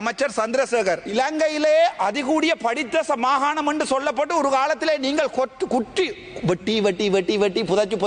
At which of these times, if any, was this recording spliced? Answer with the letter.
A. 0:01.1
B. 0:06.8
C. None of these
A